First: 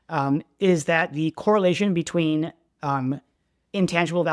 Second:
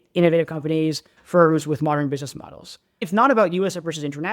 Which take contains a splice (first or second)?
second